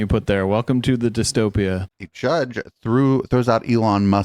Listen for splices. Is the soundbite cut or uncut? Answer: cut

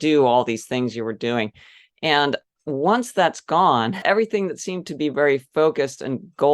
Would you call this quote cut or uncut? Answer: cut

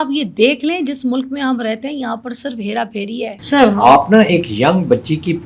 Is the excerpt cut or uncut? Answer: cut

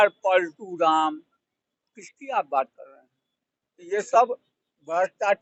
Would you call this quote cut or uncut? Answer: uncut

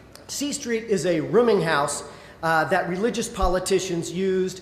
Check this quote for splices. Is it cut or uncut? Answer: cut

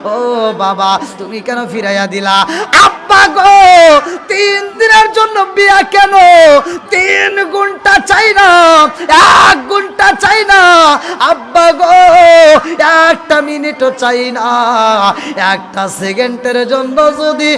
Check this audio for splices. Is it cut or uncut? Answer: uncut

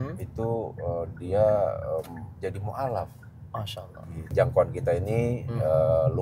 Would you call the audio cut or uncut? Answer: cut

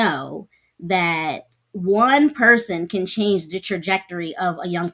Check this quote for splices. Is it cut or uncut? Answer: uncut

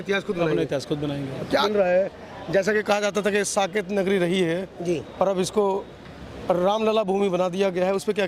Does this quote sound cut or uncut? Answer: cut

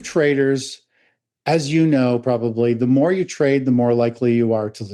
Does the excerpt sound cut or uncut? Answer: uncut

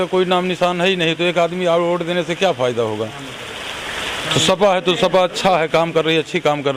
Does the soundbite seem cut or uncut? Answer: uncut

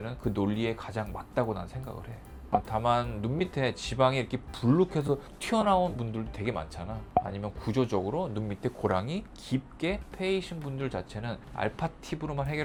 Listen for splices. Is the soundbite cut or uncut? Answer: uncut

